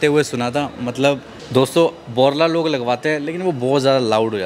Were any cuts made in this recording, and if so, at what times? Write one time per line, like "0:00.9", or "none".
0:01.3